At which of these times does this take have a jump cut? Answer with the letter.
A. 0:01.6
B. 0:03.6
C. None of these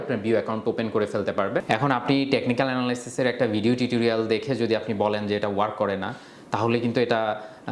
A